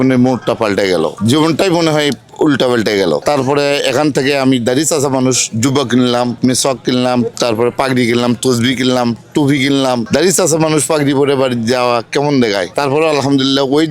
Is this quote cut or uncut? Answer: uncut